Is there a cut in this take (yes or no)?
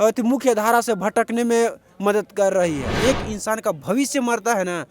yes